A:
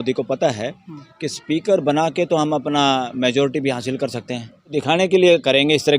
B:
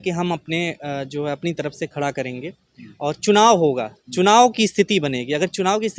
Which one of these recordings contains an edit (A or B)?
A